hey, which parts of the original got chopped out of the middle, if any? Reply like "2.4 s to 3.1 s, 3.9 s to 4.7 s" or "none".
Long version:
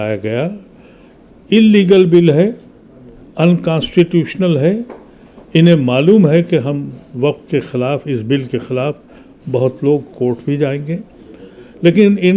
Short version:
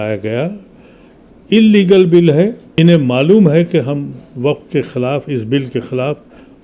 2.6 s to 5.4 s